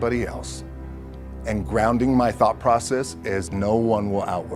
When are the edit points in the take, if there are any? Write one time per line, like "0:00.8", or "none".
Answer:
0:03.5